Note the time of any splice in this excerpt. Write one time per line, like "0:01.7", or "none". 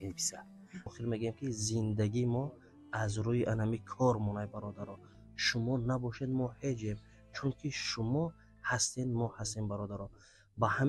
0:00.9